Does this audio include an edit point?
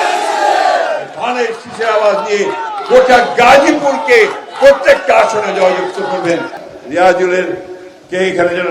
yes; 1 cut; at 6.6 s

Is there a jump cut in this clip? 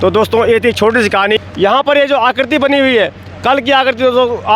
yes; 1 cut; at 1.5 s

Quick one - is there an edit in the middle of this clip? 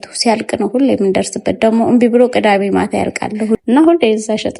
yes; 1 cut; at 3.6 s

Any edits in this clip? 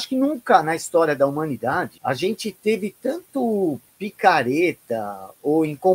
yes; 1 cut; at 1.9 s

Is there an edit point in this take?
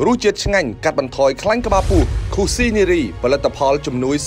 no; 0 cuts

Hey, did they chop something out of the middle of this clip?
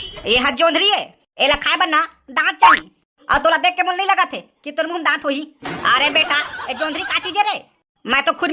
no; 0 cuts

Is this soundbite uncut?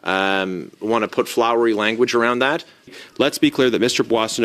no; 1 cut; at 3.0 s

